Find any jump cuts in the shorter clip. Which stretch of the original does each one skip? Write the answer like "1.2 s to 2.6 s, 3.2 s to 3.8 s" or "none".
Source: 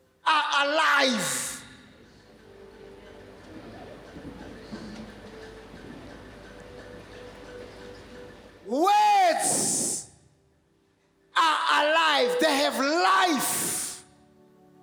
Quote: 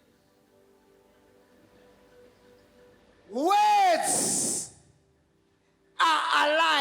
3.5 s to 7.0 s